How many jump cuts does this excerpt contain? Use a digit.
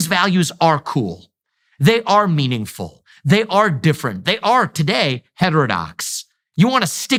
0